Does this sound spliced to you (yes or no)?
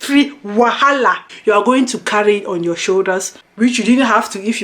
yes